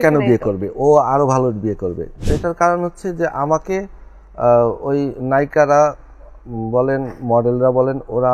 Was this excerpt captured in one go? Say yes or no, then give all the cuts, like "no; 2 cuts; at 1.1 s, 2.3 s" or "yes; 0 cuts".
no; 1 cut; at 2.3 s